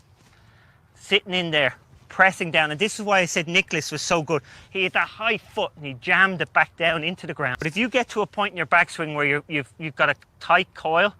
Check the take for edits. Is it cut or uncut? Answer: cut